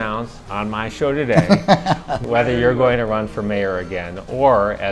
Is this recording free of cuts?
no; 1 cut; at 2.2 s

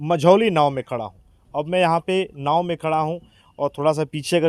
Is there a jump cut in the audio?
no; 0 cuts

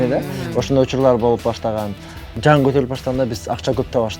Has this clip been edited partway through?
yes; 1 cut; at 2.3 s

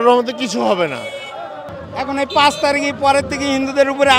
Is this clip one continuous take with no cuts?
no; 1 cut; at 1.6 s

